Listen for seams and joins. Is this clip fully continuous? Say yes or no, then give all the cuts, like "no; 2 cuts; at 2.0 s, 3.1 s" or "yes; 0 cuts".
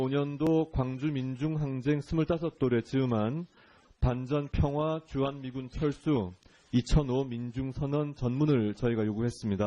no; 1 cut; at 6.0 s